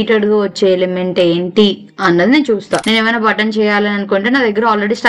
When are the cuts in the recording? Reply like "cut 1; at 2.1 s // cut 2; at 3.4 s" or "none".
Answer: cut 1; at 2.8 s